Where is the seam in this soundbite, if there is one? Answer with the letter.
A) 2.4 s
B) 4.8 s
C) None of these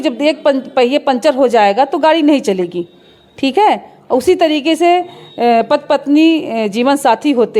C